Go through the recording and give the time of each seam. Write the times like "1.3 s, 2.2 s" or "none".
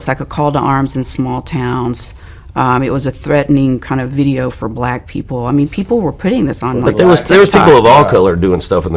none